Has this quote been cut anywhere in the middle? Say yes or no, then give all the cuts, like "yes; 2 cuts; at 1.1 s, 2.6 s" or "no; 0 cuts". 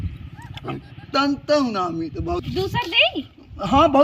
yes; 1 cut; at 2.4 s